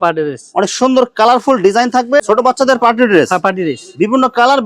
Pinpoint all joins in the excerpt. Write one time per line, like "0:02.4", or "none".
0:02.2

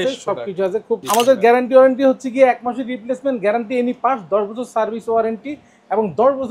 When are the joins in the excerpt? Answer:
0:01.0

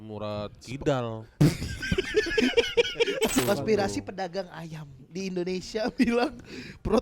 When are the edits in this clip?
0:03.4

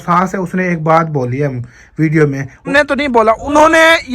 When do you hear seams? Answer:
0:02.7

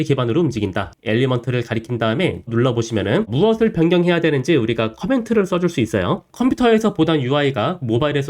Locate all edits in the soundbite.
0:00.9
0:06.3

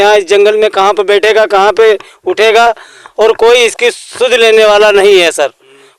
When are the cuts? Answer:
none

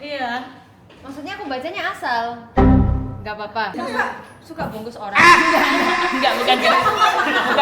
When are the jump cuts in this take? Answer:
0:03.7

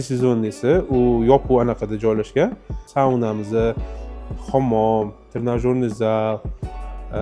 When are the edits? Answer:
0:02.8

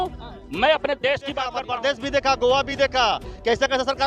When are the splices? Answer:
0:01.6

